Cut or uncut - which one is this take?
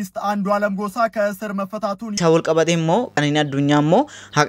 cut